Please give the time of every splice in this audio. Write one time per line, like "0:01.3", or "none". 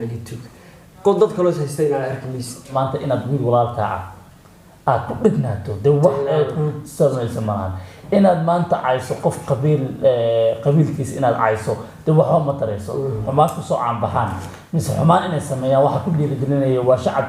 0:02.7
0:13.2